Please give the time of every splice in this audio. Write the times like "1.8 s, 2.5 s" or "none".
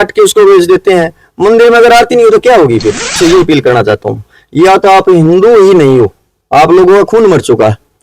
3.2 s